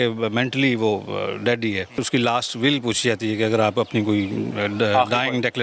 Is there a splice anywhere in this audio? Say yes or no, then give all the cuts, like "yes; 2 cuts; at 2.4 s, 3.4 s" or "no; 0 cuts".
yes; 1 cut; at 1.9 s